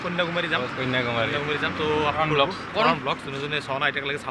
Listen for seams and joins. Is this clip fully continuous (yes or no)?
no